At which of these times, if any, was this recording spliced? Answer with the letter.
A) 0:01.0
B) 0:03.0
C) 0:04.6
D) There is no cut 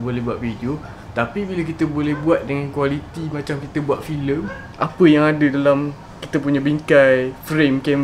C